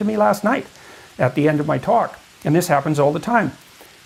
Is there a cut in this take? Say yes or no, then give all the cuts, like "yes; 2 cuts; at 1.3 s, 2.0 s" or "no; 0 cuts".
no; 0 cuts